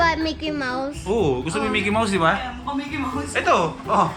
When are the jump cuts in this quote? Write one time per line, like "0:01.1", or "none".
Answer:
none